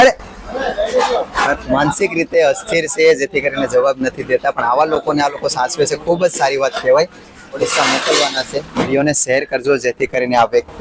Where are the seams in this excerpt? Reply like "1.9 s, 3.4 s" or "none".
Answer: 1.5 s, 7.5 s